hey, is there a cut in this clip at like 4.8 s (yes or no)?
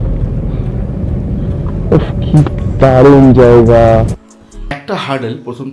yes